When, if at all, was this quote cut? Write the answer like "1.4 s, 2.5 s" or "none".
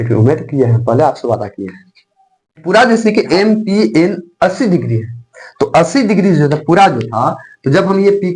2.6 s